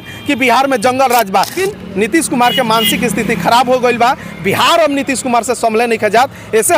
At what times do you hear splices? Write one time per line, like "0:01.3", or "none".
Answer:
0:01.6